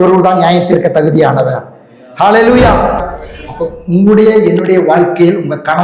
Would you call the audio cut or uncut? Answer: cut